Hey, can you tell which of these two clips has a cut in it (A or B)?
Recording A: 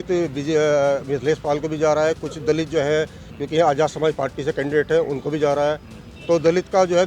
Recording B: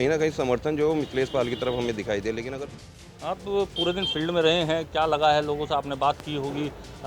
B